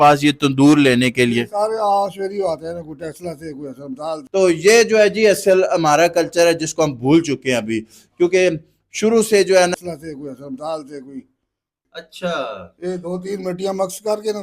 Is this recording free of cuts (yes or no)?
no